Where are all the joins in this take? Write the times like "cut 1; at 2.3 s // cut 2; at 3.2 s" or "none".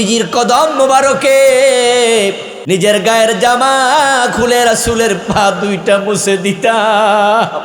cut 1; at 2.5 s